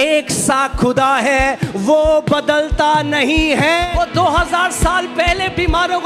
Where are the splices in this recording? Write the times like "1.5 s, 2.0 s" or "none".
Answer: 3.8 s